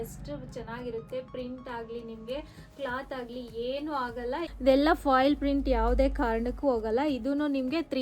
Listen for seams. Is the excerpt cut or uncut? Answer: cut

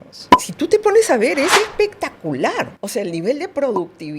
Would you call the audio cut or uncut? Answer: cut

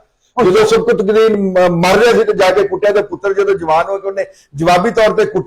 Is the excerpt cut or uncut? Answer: uncut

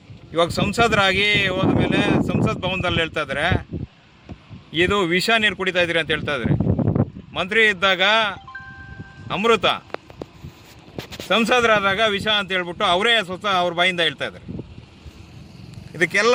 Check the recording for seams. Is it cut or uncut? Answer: uncut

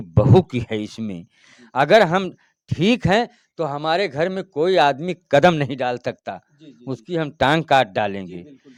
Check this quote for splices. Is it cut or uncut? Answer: uncut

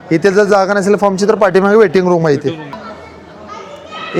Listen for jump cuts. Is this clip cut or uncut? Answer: cut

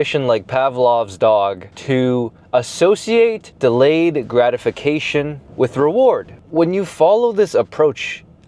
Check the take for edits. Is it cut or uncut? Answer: cut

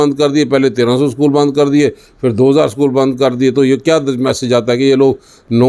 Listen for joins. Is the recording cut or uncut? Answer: uncut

